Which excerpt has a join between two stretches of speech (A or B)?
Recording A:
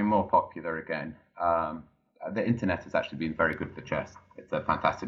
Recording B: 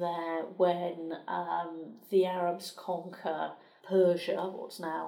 B